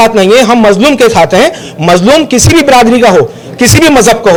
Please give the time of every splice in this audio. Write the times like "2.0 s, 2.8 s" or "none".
none

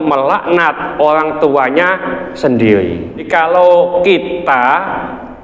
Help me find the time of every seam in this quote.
3.3 s

